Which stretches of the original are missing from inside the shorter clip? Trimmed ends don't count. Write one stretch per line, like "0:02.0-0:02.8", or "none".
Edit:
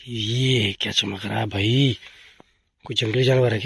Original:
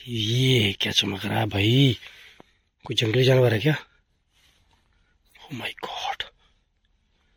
none